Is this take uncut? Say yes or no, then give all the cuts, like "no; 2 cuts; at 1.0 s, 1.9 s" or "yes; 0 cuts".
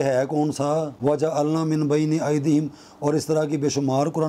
no; 1 cut; at 0.9 s